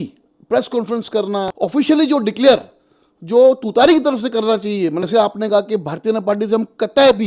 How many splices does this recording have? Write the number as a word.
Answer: two